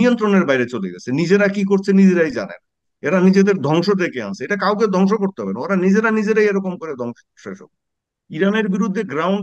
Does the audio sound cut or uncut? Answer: uncut